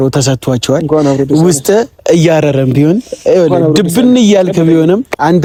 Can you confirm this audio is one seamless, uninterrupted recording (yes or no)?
yes